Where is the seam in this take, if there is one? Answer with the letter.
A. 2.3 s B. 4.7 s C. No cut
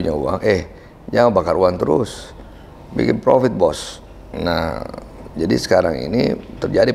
C